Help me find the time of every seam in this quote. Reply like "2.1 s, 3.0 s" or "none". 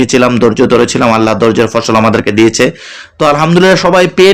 none